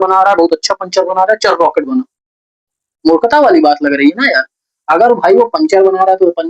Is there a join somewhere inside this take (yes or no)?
no